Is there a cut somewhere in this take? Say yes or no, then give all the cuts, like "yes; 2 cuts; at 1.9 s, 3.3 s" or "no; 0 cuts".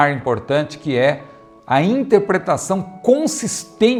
no; 0 cuts